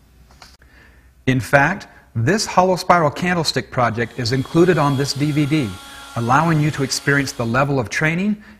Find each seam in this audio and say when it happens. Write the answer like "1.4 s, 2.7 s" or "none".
1.5 s